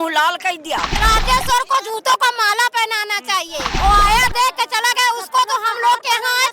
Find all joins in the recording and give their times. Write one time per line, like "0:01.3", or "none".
0:01.0
0:03.7